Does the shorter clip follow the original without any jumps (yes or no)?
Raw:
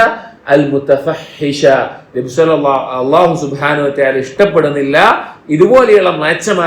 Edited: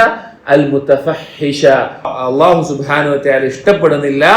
no